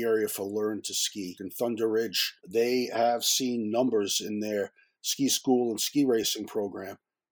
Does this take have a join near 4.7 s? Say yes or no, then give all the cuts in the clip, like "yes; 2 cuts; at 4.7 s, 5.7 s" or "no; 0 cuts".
no; 2 cuts; at 1.4 s, 2.4 s